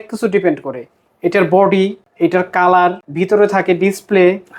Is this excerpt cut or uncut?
cut